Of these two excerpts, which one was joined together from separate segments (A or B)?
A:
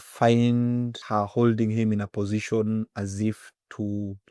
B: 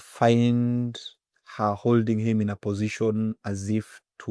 A